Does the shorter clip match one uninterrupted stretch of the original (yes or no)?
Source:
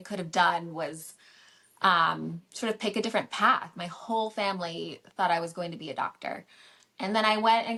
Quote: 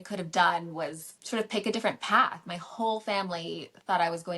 no